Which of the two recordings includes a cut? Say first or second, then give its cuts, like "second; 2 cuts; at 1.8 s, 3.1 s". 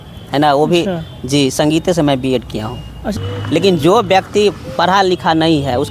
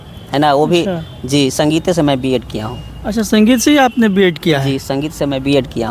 first; 1 cut; at 3.1 s